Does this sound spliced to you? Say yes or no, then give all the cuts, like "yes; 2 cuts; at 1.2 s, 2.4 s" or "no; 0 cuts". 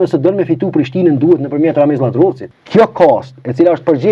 yes; 1 cut; at 2.5 s